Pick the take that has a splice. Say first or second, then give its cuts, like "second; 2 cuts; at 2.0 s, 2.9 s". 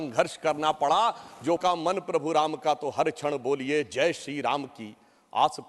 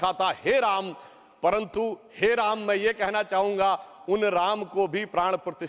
first; 1 cut; at 1.6 s